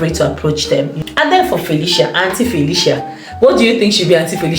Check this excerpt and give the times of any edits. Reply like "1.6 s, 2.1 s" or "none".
1.0 s